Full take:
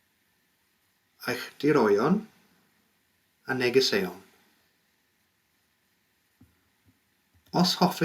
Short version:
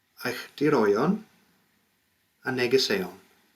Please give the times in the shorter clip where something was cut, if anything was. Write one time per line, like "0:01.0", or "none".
none